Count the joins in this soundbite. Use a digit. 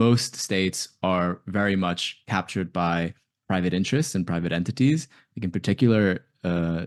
0